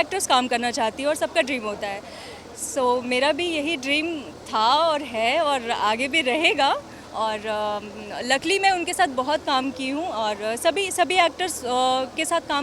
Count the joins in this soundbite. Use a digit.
0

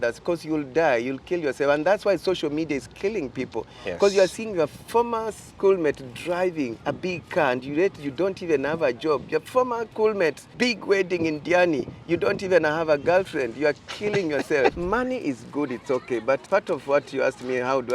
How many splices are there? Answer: 5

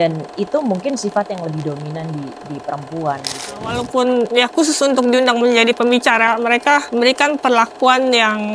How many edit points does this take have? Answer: 1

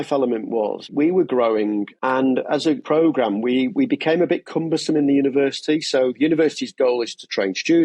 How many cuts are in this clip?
3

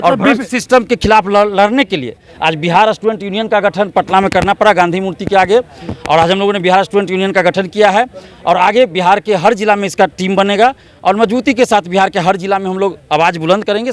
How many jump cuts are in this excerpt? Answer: 0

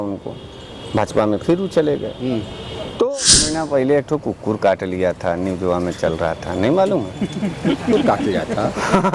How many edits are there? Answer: 1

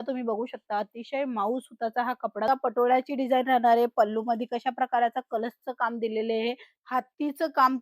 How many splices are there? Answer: 2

